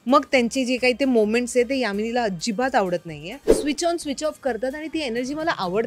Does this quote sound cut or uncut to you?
cut